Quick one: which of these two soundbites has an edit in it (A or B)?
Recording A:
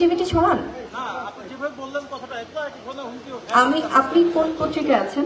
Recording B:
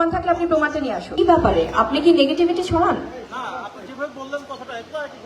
B